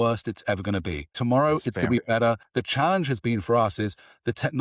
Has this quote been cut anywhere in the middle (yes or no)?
yes